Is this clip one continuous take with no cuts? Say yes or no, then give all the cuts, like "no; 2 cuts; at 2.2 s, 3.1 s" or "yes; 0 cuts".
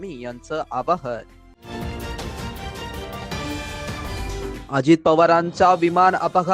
no; 2 cuts; at 1.4 s, 4.0 s